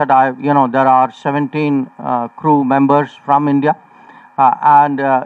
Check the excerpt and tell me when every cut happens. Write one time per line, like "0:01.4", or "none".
none